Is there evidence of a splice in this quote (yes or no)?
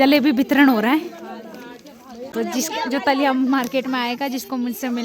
yes